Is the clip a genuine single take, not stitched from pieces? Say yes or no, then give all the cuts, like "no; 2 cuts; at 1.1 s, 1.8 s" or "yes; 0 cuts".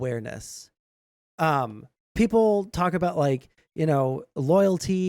no; 1 cut; at 2.0 s